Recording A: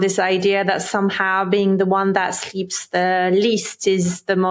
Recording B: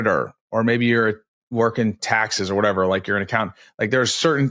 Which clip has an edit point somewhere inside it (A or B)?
B